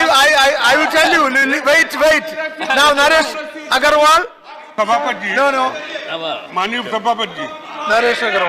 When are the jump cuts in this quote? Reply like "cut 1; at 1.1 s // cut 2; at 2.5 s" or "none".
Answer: none